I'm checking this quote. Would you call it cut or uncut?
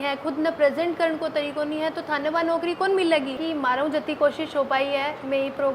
cut